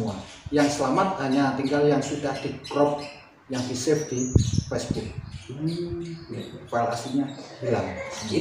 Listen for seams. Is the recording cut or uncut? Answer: uncut